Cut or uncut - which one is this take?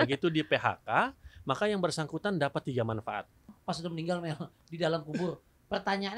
cut